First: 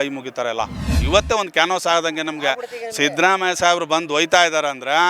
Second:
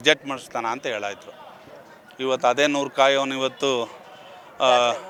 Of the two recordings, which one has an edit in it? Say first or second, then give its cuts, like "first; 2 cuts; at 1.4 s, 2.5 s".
first; 1 cut; at 1.0 s